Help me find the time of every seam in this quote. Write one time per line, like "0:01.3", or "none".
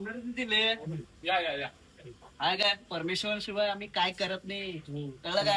none

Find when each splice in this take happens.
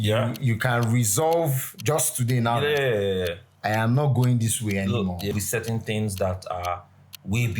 0:05.3

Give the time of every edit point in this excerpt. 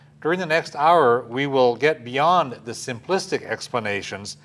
0:01.1

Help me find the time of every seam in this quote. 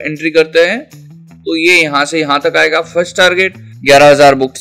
0:03.7

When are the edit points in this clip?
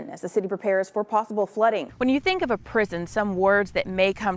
0:01.9

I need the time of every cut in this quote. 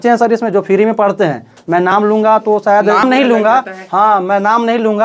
none

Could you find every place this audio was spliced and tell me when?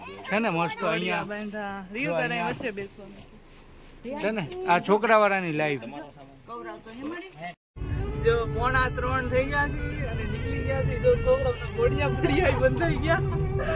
none

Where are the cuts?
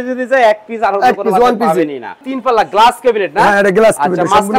0:02.3

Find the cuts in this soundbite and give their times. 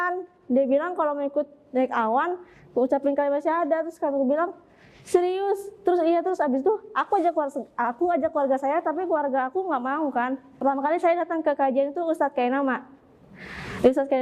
0:10.5

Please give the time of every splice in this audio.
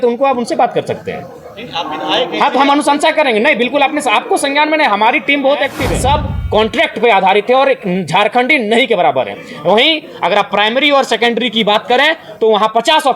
0:05.8

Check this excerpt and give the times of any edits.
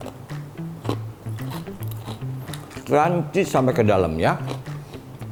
none

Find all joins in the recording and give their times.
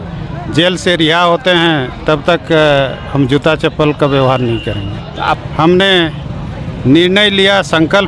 0:05.4

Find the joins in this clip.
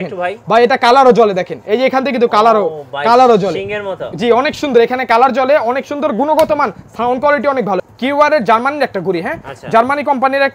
0:07.8

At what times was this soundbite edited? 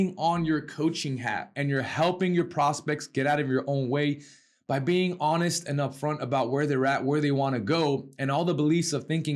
0:01.5

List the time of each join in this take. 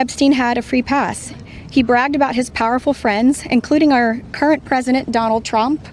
none

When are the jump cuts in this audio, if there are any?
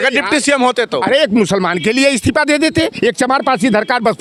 none

